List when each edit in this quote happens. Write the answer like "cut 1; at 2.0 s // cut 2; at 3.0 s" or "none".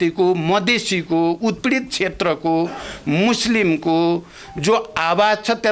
none